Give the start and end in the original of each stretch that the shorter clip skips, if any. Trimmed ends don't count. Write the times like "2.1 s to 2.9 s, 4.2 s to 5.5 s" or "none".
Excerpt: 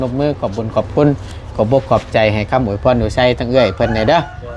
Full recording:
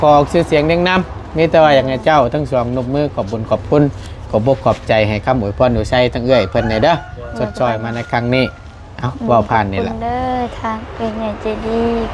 none